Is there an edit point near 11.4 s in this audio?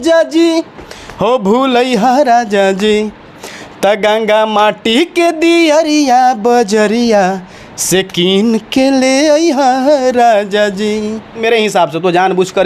yes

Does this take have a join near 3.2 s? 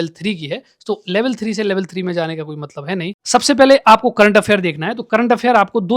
yes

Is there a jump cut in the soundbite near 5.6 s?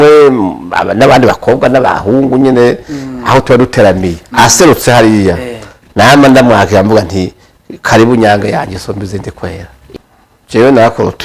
no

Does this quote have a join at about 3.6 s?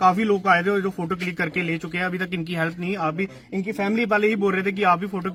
no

